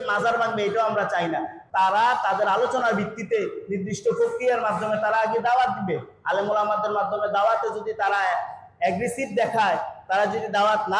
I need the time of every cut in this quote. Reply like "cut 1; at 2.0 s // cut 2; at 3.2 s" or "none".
cut 1; at 1.6 s